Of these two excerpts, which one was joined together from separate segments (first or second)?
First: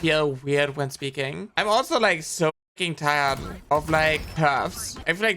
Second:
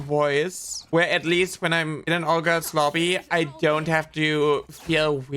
first